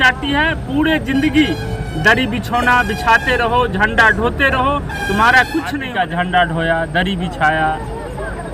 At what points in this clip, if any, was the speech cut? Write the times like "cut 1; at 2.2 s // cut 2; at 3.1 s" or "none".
cut 1; at 5.8 s